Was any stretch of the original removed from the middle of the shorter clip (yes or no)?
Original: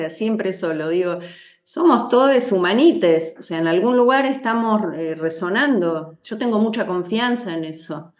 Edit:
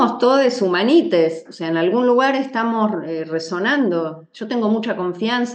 no